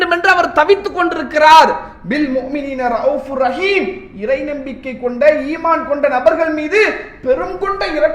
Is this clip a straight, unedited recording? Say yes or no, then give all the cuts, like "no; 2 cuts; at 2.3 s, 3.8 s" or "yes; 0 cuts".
yes; 0 cuts